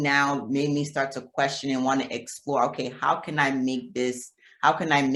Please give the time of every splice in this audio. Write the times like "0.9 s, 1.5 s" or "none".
none